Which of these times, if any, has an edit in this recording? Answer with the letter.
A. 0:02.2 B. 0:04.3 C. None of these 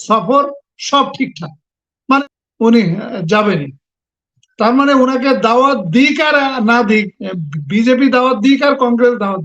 A